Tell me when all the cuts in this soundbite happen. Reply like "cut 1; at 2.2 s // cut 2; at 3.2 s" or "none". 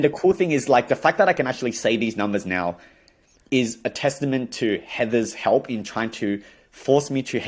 none